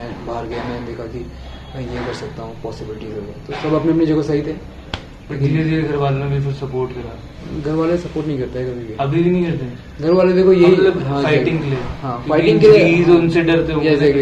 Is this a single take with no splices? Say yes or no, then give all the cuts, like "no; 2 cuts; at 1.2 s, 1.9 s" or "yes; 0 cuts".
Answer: yes; 0 cuts